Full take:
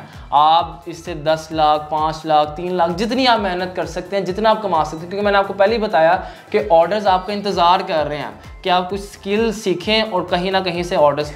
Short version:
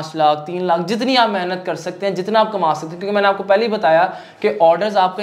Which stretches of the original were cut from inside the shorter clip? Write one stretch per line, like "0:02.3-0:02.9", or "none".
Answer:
none